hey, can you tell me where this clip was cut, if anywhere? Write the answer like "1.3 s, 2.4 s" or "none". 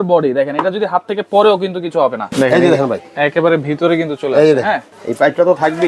2.2 s, 4.9 s